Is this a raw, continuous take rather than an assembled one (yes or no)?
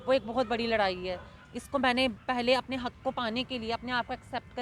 yes